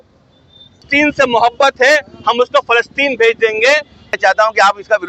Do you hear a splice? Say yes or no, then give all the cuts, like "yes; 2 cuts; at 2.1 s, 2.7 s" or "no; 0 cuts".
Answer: yes; 2 cuts; at 0.8 s, 4.2 s